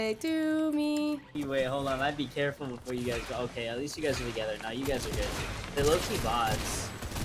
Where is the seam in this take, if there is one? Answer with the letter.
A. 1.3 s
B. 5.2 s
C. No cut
A